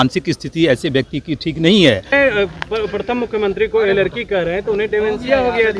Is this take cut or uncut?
cut